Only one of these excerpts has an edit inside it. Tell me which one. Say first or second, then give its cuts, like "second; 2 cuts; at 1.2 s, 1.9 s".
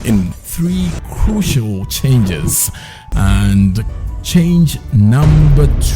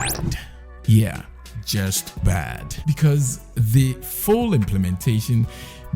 first; 2 cuts; at 3.8 s, 4.8 s